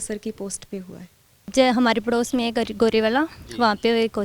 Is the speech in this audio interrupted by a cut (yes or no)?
yes